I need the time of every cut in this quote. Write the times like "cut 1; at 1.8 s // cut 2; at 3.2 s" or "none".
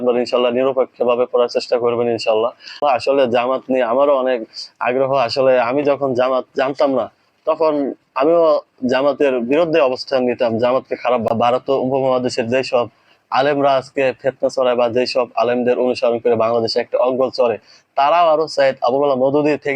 cut 1; at 2.8 s // cut 2; at 11.3 s